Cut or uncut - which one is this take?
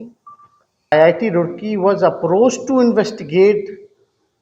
cut